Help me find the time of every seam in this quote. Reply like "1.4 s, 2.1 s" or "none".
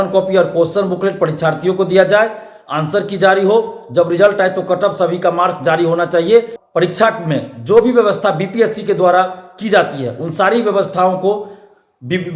6.6 s